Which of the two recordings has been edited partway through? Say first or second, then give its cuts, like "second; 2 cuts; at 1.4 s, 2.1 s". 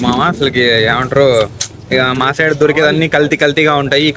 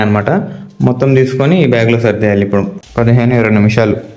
second; 1 cut; at 2.8 s